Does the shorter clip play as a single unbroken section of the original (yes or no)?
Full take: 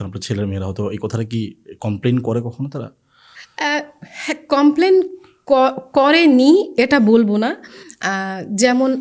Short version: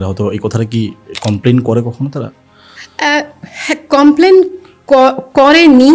yes